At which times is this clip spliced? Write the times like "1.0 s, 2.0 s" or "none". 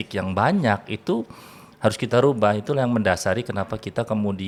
none